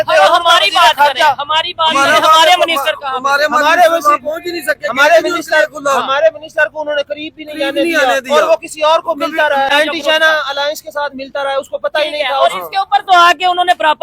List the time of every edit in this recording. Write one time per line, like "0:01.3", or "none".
0:09.7